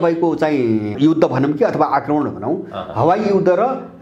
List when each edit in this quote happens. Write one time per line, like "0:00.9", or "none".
0:00.9